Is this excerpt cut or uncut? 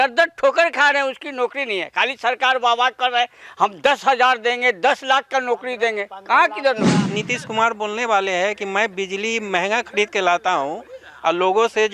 cut